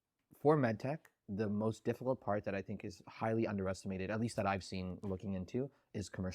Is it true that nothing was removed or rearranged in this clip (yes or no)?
yes